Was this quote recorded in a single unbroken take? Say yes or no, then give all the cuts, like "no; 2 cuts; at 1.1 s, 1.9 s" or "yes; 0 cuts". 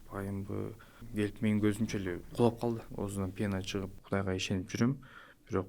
no; 3 cuts; at 1.0 s, 2.9 s, 4.0 s